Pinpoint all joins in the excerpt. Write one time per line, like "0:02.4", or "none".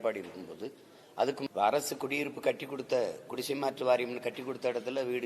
0:01.5

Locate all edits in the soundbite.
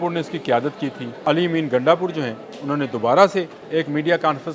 0:01.2
0:03.6

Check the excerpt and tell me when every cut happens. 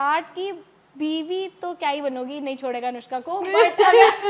none

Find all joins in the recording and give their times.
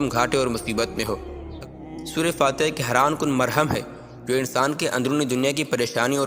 0:01.4

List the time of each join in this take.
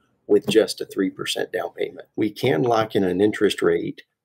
0:02.0

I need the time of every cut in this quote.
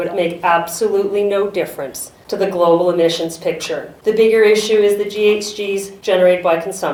none

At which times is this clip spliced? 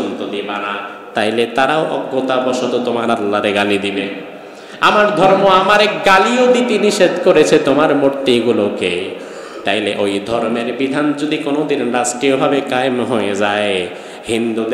none

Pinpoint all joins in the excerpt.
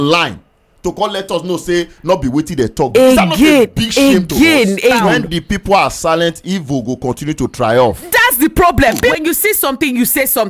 0:05.0
0:09.1

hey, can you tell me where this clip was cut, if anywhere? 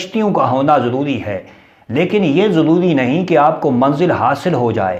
none

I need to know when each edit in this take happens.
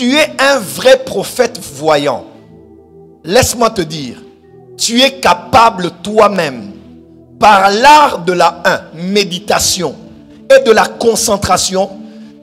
none

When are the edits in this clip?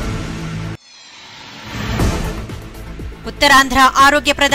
0:00.9
0:02.4

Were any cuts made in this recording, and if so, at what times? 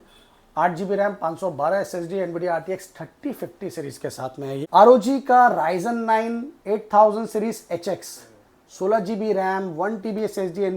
0:04.6

